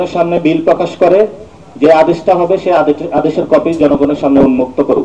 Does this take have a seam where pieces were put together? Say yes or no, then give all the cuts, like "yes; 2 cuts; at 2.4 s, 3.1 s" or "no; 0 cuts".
no; 0 cuts